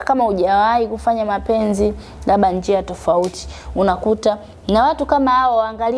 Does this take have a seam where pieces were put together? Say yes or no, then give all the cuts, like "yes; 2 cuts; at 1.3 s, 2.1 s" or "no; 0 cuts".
no; 0 cuts